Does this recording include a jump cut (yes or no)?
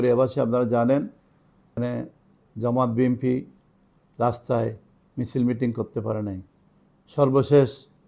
yes